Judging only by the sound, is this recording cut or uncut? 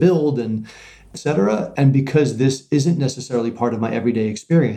cut